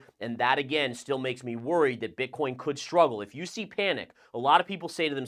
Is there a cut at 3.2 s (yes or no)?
no